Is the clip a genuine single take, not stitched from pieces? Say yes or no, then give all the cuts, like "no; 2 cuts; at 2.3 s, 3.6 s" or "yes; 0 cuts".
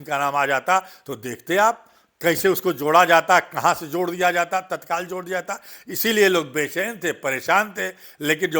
yes; 0 cuts